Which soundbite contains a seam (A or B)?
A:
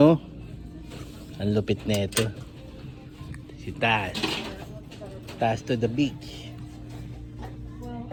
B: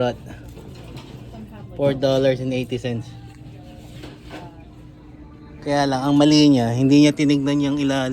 B